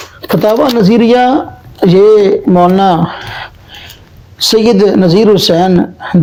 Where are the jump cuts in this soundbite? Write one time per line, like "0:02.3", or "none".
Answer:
none